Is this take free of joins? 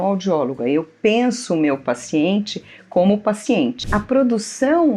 no; 1 cut; at 3.8 s

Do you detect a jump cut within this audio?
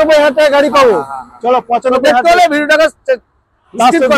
no; 0 cuts

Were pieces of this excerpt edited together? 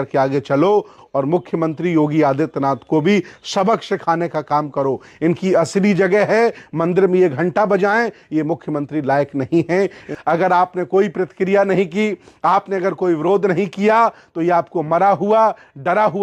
yes; 1 cut; at 10.1 s

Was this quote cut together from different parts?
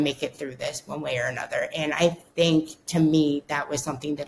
no; 0 cuts

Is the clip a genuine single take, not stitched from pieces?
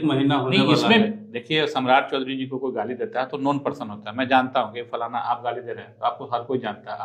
yes; 0 cuts

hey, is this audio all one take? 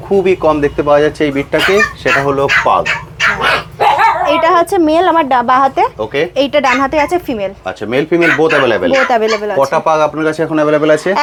yes; 0 cuts

